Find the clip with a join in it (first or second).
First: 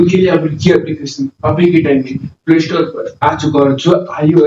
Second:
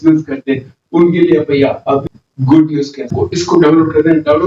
second